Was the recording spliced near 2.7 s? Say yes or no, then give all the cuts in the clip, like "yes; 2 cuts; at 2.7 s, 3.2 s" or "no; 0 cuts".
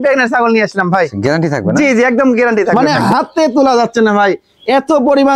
yes; 1 cut; at 2.7 s